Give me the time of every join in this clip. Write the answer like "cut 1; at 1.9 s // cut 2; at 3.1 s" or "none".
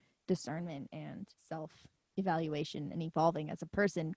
cut 1; at 1.3 s